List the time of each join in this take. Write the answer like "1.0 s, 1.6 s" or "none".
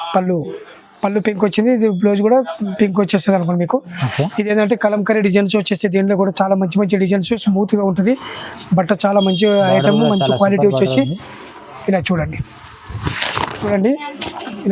13.6 s